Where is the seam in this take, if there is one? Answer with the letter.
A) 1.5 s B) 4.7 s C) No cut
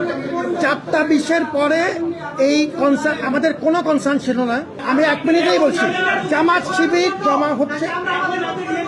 B